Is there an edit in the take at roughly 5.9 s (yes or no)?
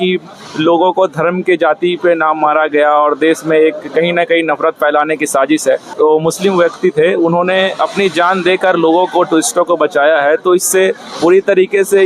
yes